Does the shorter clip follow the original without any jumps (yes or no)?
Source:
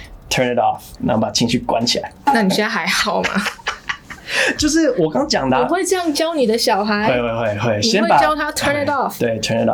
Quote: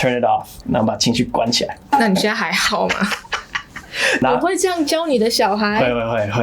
no